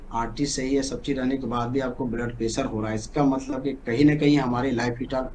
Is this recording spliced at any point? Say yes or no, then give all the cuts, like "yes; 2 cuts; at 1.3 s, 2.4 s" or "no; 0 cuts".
no; 0 cuts